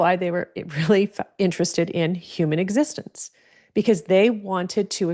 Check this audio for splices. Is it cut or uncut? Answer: uncut